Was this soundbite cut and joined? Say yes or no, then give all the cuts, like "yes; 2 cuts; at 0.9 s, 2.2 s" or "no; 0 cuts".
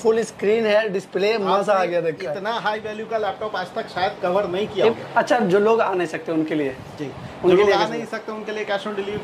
yes; 1 cut; at 4.9 s